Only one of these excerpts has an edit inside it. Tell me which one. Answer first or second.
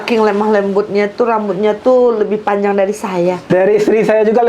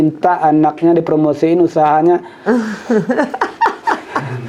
first